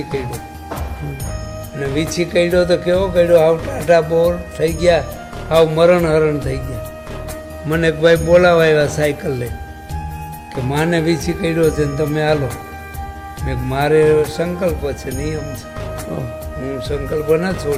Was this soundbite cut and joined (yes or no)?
no